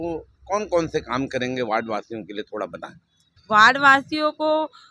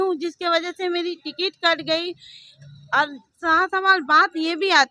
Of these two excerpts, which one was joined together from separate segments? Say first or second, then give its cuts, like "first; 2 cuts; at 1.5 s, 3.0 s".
first; 1 cut; at 3.3 s